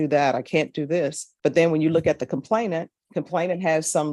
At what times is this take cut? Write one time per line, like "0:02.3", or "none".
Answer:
0:01.2
0:03.0

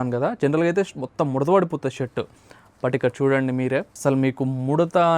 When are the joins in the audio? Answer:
0:03.9

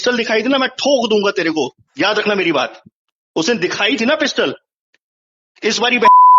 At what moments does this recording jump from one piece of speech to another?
none

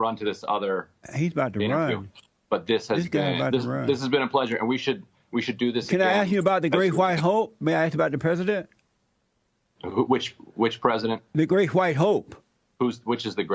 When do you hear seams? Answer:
none

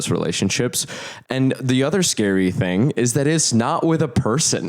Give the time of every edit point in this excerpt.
0:01.1

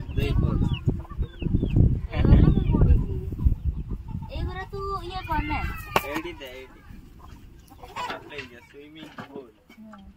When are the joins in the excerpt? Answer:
0:08.3

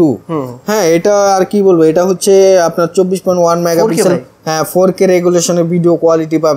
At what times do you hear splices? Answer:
none

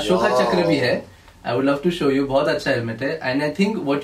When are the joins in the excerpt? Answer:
none

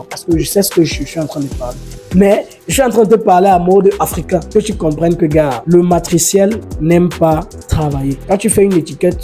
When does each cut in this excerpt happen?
0:01.9
0:04.5
0:05.6
0:08.2

